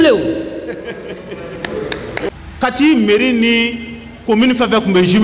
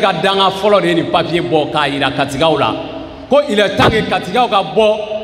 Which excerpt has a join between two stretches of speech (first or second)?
first